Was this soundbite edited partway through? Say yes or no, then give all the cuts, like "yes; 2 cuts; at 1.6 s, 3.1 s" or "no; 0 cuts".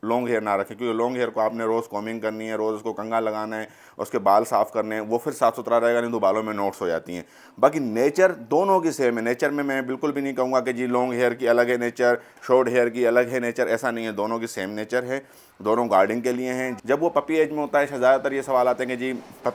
no; 0 cuts